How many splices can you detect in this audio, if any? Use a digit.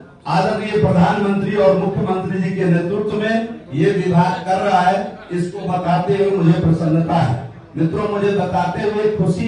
0